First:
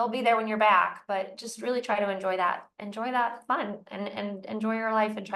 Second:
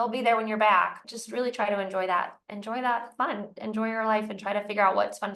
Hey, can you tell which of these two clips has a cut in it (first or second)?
second